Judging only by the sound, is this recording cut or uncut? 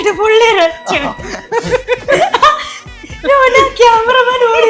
uncut